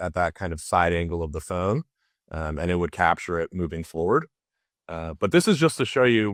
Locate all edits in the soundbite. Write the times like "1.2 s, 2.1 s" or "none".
none

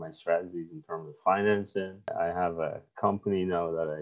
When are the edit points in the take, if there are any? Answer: 2.1 s

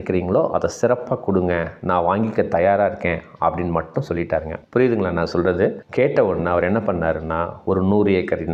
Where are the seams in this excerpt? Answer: none

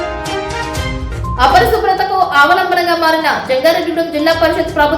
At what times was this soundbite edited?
0.9 s

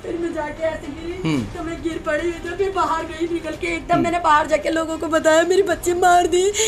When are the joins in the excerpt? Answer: none

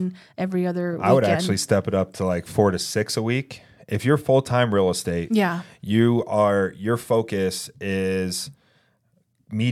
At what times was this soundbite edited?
none

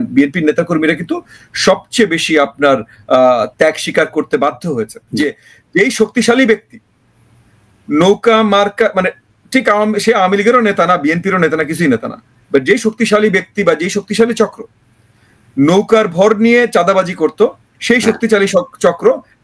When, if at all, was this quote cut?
5.0 s

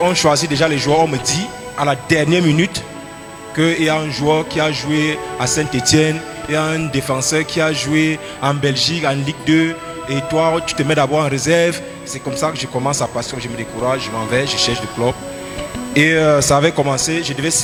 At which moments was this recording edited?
none

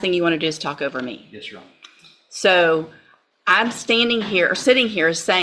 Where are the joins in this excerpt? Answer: none

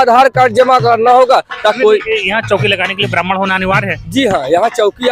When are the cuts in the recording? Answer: 1.8 s

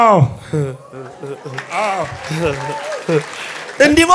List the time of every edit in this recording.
none

